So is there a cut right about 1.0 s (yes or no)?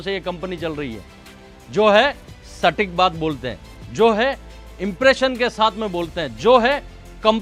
no